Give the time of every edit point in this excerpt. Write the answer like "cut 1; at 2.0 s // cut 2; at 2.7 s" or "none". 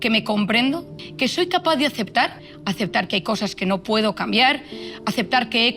cut 1; at 1.0 s // cut 2; at 2.4 s